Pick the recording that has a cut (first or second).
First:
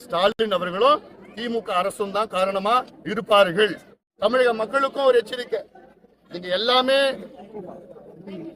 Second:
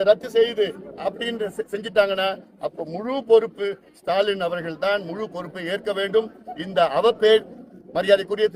first